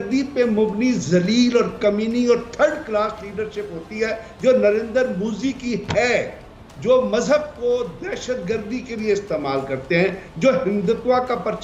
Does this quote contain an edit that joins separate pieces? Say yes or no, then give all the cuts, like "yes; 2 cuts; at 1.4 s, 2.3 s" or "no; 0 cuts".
no; 0 cuts